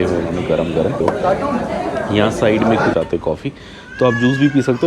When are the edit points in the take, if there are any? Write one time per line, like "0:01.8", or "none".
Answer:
0:01.0
0:02.9